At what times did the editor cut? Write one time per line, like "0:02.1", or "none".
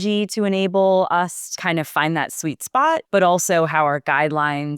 0:01.4
0:03.0